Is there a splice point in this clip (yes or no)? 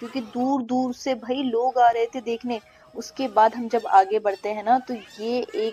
no